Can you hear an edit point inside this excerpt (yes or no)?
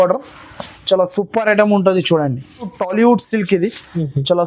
yes